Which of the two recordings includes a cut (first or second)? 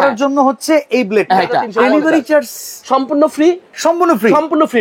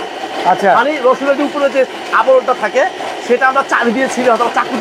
first